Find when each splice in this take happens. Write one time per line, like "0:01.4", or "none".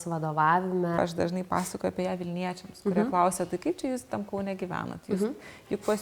0:01.0

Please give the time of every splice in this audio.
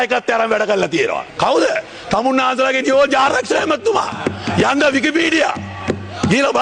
none

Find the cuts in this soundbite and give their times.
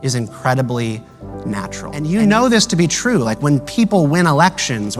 0:01.9

